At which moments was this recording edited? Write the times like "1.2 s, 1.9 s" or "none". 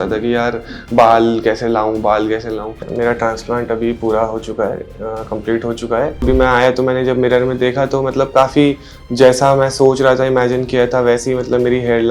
2.9 s, 6.2 s